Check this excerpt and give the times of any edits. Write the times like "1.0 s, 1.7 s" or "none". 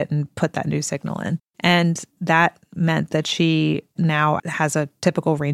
1.5 s, 4.4 s